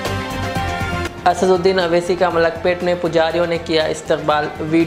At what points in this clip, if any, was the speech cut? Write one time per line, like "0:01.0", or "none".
none